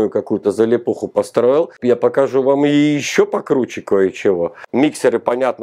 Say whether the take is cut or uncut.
cut